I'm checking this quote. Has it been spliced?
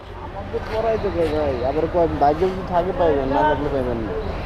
no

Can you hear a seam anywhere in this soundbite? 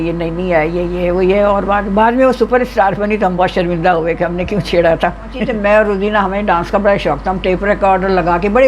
yes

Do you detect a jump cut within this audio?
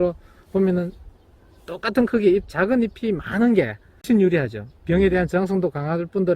yes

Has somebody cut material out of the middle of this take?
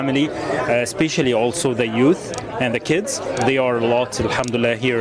no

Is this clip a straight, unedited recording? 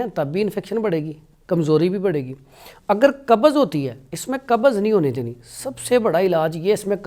yes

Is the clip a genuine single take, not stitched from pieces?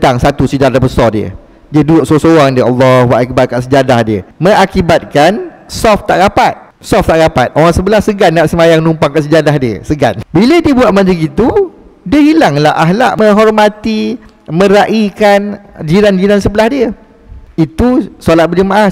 no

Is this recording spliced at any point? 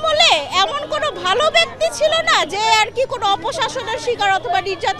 no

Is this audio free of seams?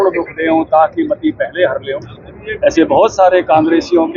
yes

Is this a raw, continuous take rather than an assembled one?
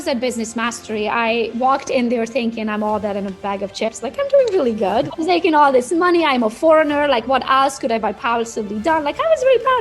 no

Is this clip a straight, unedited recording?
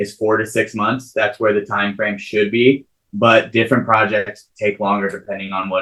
yes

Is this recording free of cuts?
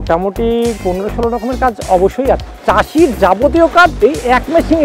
no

